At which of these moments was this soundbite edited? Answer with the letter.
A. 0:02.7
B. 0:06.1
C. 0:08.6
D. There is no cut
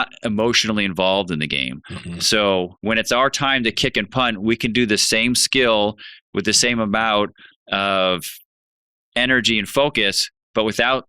A